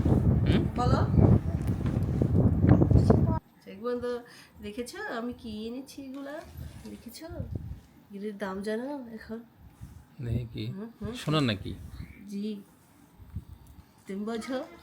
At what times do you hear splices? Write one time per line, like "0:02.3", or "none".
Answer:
0:03.5